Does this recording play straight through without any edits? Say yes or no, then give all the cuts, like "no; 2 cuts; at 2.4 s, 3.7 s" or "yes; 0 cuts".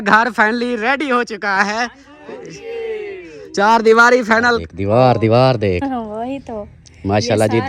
no; 1 cut; at 4.7 s